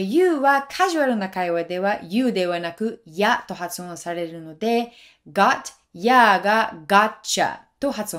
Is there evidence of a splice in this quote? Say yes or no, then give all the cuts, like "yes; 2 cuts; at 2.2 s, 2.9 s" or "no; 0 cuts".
no; 0 cuts